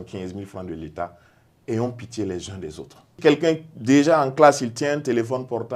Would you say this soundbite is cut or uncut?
cut